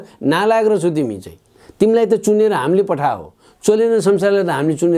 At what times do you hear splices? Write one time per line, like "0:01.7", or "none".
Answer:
none